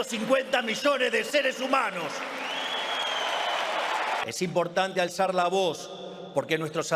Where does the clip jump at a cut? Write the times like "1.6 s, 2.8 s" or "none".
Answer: 4.2 s